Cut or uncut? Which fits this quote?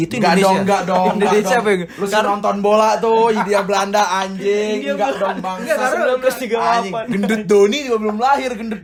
uncut